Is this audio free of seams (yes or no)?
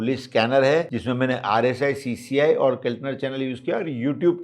no